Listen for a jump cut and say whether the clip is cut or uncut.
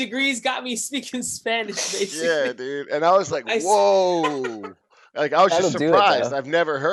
uncut